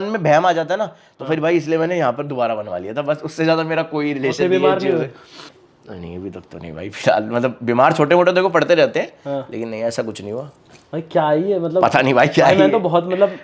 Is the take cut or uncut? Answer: uncut